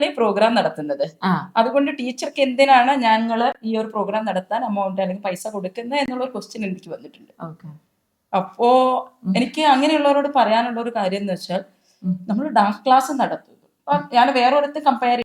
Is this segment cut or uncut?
uncut